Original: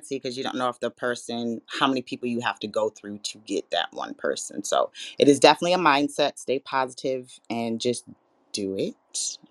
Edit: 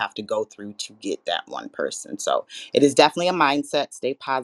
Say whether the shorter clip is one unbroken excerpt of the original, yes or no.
yes